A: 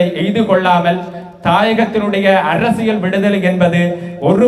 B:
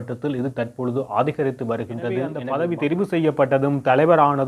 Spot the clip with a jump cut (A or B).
B